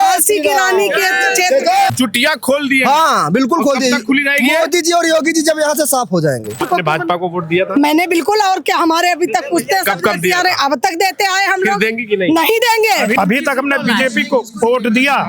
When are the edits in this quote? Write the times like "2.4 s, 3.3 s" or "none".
1.9 s, 6.6 s, 13.1 s